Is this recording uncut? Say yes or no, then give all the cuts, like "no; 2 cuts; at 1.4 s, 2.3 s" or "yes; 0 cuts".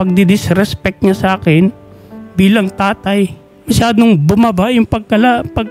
yes; 0 cuts